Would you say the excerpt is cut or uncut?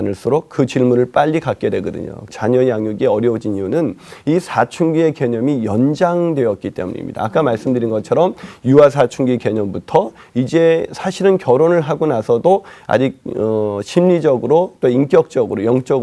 cut